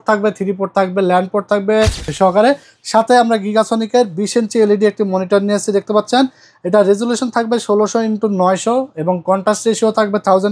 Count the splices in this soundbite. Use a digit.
1